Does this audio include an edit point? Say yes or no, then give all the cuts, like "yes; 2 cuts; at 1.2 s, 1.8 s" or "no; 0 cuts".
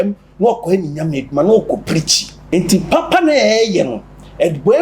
yes; 1 cut; at 2.4 s